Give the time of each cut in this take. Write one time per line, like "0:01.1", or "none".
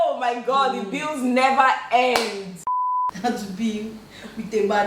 0:02.6